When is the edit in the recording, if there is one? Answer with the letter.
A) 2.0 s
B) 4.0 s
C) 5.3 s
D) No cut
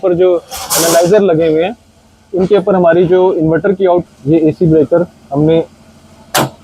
B